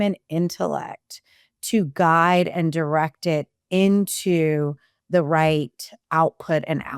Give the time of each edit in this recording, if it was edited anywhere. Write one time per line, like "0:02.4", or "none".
0:05.9